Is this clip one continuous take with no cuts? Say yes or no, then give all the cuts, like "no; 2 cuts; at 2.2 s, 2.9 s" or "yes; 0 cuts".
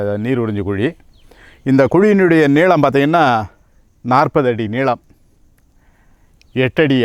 yes; 0 cuts